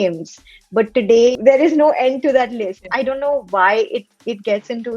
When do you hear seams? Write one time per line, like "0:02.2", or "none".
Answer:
0:01.4
0:02.8

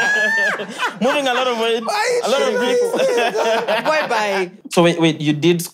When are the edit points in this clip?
0:04.6

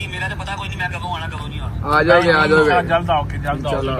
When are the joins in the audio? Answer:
none

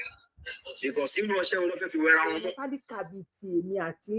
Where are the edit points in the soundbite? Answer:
0:02.6

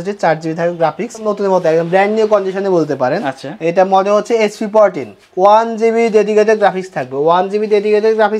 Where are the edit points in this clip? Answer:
0:01.3

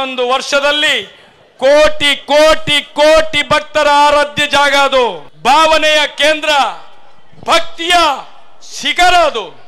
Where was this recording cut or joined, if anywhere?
0:05.3

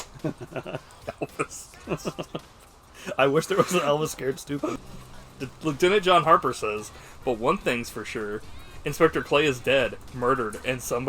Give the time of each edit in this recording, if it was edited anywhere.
0:04.8

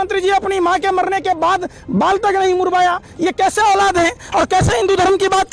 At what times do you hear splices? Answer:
none

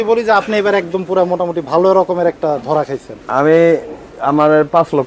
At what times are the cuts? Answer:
none

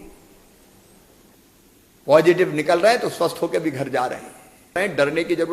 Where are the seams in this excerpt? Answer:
0:01.4
0:04.8

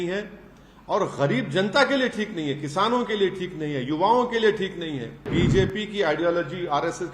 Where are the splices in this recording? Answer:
0:05.3

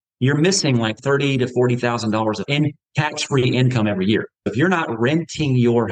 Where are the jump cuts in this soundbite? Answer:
0:01.0
0:02.5
0:04.5

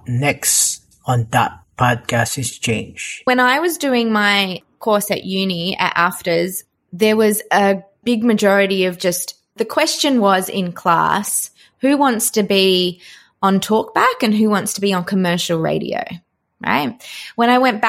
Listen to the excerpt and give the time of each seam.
0:03.2
0:04.6

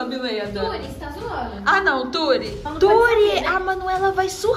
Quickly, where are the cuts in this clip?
0:02.7

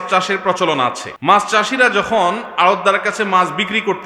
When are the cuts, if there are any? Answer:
0:01.1

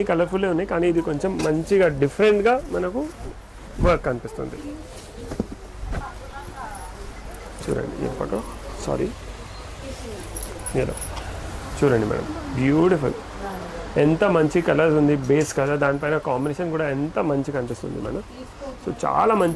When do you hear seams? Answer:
none

